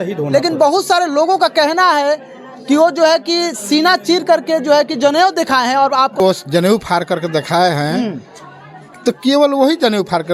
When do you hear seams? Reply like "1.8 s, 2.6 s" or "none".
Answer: 6.2 s